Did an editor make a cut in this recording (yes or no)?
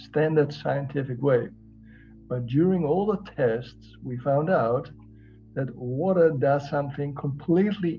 no